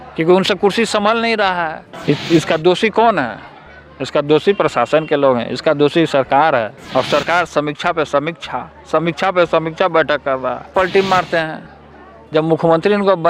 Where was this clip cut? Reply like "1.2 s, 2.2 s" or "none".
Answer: 1.9 s, 6.8 s, 10.7 s